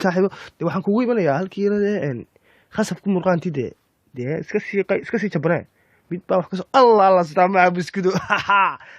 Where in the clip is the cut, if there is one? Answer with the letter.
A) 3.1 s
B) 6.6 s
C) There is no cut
B